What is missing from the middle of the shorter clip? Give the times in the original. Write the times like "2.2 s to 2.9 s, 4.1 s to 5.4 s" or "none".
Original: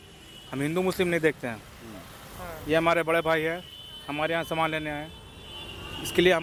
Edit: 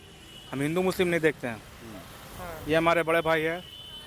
none